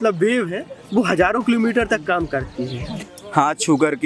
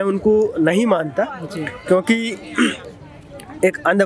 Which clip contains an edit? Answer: first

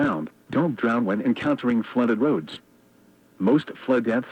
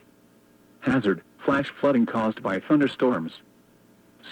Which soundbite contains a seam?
second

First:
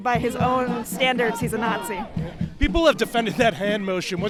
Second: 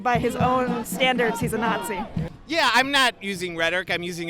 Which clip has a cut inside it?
second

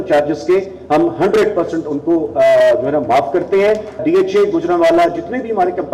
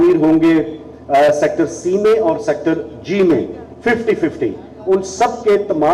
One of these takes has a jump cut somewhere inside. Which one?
first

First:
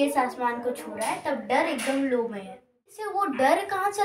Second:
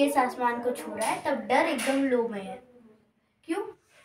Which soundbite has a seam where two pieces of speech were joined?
first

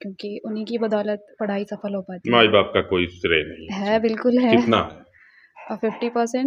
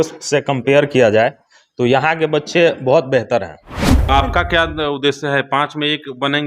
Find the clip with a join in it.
second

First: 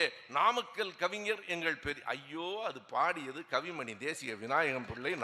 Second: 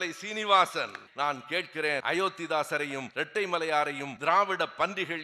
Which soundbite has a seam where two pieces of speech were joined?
second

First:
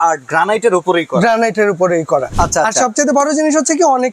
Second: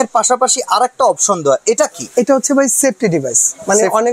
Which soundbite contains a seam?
first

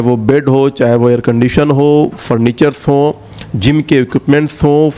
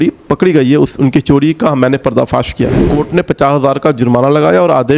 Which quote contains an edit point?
second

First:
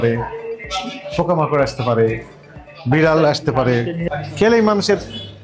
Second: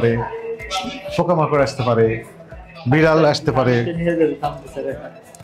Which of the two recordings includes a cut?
first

